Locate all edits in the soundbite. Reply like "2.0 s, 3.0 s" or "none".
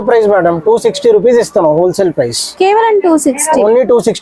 none